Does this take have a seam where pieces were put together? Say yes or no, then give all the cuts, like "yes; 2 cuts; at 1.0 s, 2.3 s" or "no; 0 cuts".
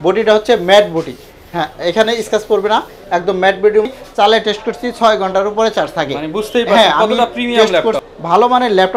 yes; 2 cuts; at 3.9 s, 8.1 s